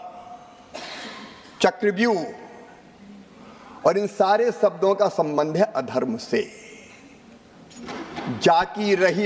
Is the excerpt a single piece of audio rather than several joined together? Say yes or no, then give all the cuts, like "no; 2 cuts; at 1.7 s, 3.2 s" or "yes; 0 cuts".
yes; 0 cuts